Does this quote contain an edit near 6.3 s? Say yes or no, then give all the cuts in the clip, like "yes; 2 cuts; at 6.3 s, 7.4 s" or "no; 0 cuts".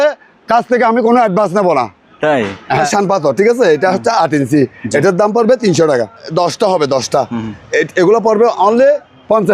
yes; 2 cuts; at 2.9 s, 6.3 s